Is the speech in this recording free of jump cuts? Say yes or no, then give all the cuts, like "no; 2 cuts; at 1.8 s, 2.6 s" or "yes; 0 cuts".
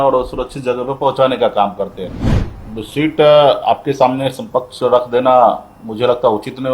no; 1 cut; at 2.4 s